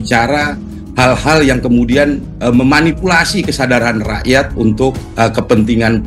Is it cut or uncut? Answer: uncut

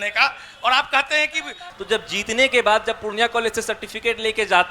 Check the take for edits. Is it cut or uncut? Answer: cut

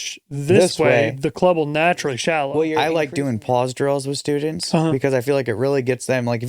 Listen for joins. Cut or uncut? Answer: cut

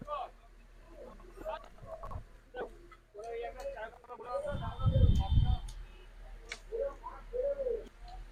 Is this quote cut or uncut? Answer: uncut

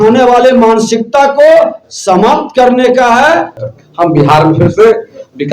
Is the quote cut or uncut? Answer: cut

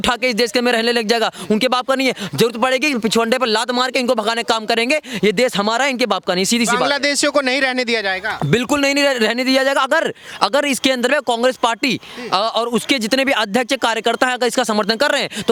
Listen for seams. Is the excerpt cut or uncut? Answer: uncut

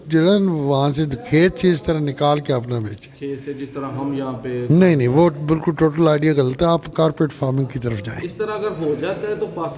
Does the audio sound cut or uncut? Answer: uncut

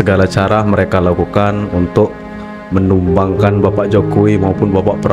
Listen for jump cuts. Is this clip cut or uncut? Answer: uncut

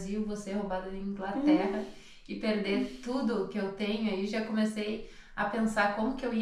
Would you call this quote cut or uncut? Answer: uncut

